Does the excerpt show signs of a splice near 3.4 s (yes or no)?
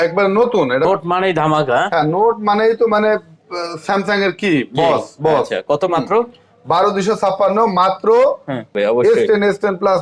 no